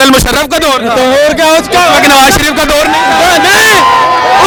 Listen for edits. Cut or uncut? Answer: uncut